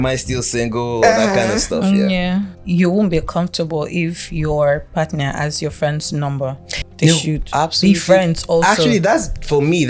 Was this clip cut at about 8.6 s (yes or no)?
no